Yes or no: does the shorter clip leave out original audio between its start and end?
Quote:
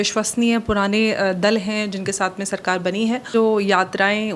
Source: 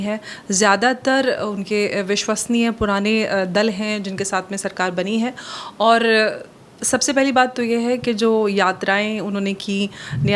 yes